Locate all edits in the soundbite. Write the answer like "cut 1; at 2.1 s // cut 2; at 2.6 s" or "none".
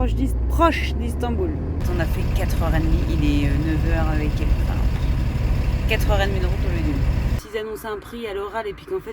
cut 1; at 1.8 s // cut 2; at 7.4 s